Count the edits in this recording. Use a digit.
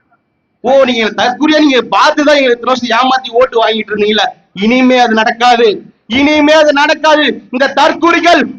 0